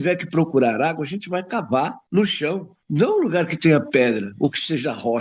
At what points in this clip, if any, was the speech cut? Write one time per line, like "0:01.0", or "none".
0:02.0
0:02.7